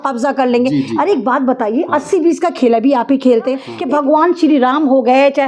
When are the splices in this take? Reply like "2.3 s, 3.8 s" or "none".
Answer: 3.7 s